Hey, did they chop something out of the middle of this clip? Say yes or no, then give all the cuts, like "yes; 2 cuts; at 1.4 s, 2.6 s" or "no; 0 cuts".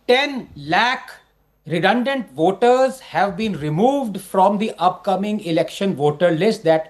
no; 0 cuts